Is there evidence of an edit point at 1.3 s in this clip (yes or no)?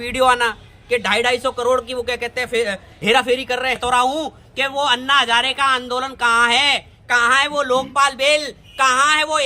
no